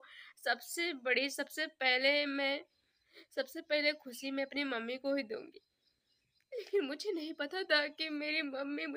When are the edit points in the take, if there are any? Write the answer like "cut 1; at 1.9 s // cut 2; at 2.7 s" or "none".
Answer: none